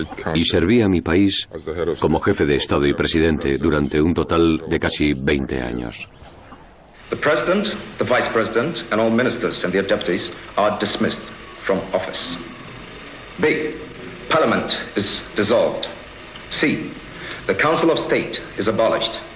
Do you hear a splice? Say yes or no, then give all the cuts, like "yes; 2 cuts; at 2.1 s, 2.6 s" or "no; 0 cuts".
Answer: no; 0 cuts